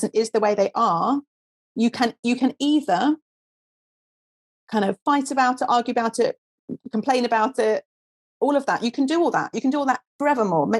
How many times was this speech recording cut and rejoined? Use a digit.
0